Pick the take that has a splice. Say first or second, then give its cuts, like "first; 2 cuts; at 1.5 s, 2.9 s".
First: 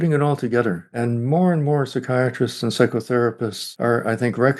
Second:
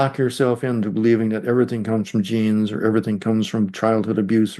first; 2 cuts; at 0.9 s, 3.6 s